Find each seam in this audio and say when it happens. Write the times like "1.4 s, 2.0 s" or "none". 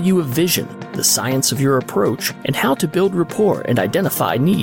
none